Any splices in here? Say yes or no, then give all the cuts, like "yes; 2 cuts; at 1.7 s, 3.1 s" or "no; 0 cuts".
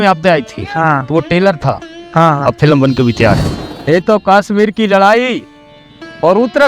yes; 1 cut; at 3.6 s